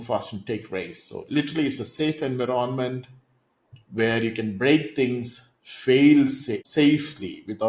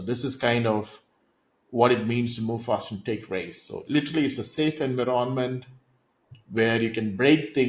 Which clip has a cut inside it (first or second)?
first